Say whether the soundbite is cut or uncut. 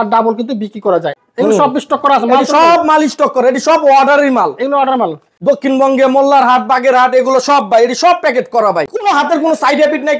cut